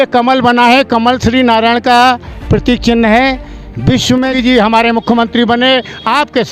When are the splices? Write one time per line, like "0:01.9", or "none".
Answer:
0:04.3

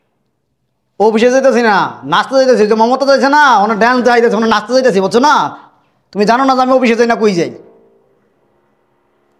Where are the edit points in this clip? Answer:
none

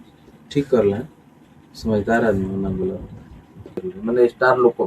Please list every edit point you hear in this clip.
0:03.9

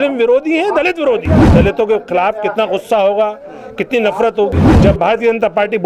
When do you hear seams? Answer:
0:01.5
0:04.7

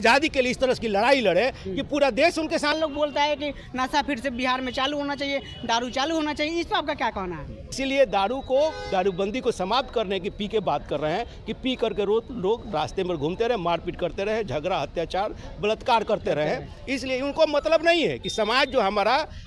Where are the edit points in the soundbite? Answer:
0:02.8
0:07.7

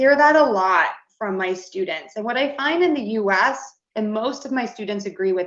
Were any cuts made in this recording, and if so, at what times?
none

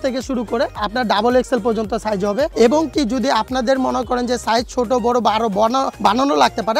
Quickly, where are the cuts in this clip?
none

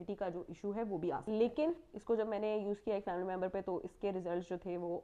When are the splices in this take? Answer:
0:01.2

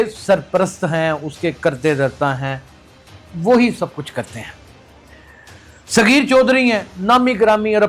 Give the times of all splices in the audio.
0:04.5
0:05.9

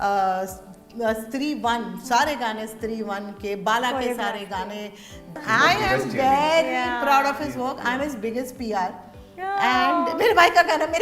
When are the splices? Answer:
0:05.3

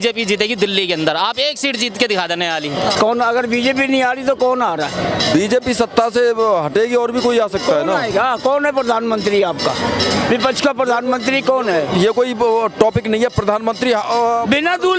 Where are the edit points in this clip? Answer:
0:02.9

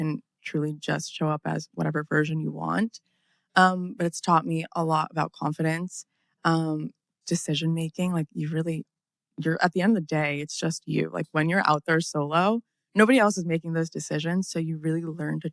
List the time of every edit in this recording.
none

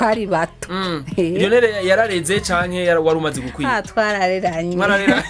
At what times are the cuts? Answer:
none

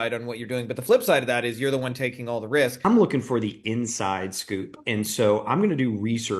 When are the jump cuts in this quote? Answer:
0:02.8

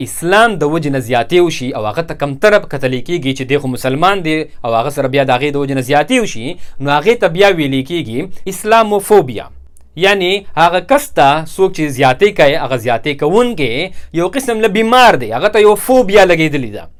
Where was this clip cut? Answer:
none

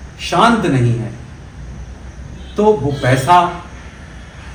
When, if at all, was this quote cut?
none

